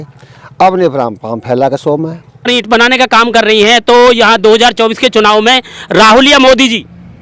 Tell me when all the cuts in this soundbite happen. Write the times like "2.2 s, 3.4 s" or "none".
2.4 s